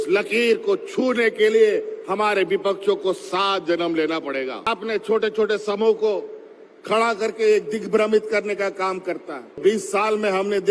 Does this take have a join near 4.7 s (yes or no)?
yes